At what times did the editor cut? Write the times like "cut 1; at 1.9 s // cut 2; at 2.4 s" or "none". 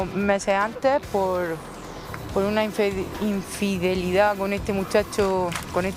none